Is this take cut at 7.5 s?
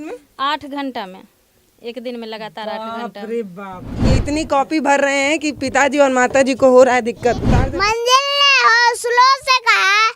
yes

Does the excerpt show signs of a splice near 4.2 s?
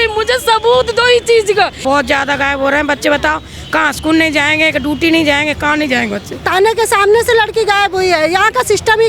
no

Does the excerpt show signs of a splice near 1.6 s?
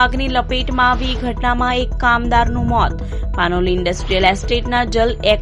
no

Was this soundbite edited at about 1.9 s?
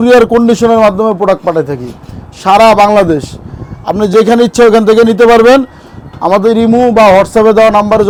no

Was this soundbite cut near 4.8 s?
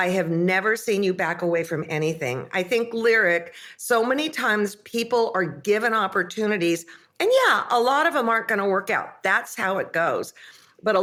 no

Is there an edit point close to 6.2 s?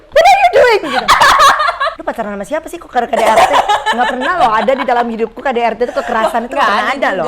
no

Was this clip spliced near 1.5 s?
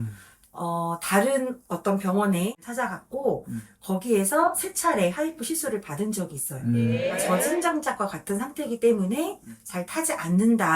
no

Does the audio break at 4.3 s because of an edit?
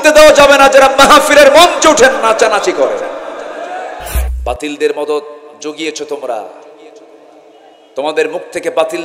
yes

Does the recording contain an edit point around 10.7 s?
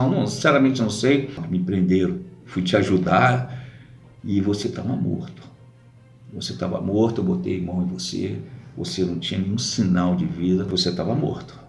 yes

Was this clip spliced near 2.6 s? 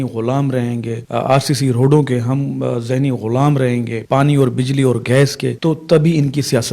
no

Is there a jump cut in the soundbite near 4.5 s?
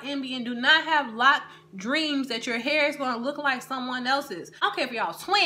yes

